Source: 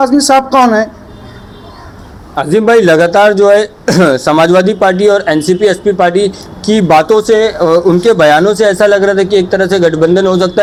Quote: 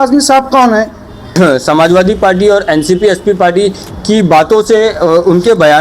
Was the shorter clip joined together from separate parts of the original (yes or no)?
yes